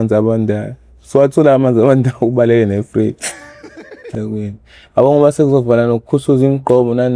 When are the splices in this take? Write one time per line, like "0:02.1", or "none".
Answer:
0:04.1

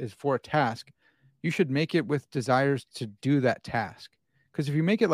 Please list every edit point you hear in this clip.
none

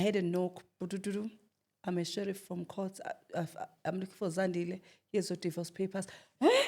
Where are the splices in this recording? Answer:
none

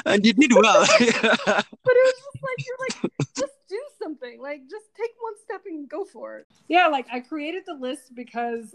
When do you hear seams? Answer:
0:06.4

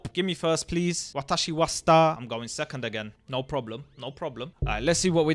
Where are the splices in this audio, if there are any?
none

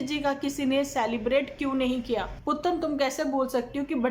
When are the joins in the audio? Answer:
0:02.3

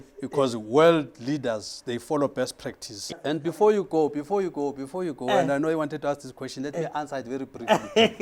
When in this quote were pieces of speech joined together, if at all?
0:03.2

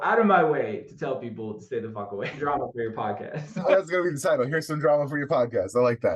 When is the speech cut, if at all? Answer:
0:02.3
0:03.6

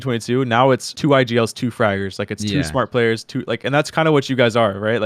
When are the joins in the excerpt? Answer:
0:00.9

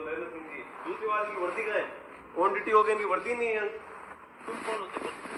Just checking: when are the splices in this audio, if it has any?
none

